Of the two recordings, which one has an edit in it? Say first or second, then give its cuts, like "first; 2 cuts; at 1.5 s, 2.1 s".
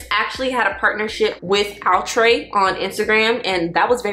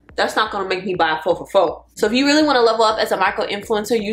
second; 1 cut; at 1.8 s